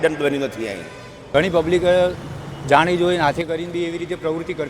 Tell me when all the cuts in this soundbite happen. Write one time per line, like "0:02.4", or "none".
0:01.2